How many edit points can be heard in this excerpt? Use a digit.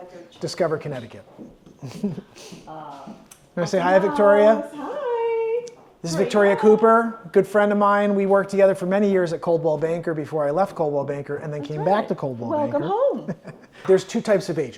1